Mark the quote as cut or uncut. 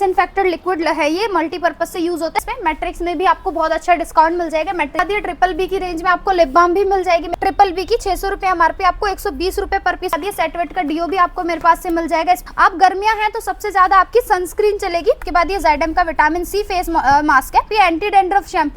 cut